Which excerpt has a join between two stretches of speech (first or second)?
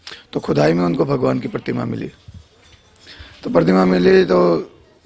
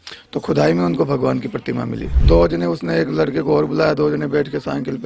second